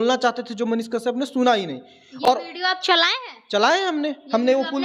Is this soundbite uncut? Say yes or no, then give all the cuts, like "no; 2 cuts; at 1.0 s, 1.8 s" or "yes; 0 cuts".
yes; 0 cuts